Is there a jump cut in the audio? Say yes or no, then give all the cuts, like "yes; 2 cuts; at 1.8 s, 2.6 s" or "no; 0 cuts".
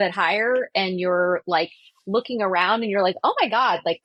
no; 0 cuts